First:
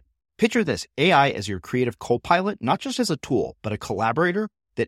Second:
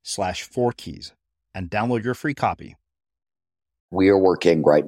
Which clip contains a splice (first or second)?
second